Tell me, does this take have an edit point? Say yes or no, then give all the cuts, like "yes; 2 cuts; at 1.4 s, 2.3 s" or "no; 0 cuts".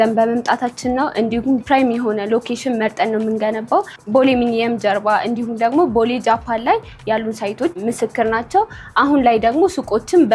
no; 0 cuts